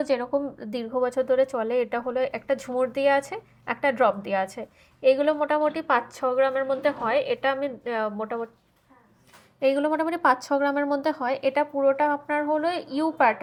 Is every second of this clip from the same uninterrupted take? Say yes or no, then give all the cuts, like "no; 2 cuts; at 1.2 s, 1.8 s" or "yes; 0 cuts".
yes; 0 cuts